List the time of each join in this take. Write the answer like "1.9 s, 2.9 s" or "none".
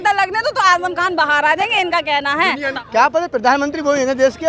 2.7 s